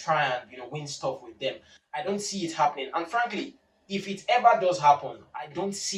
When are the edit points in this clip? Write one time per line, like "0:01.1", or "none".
none